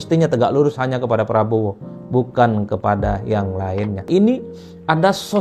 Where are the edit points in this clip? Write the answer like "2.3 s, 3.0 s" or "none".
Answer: 4.0 s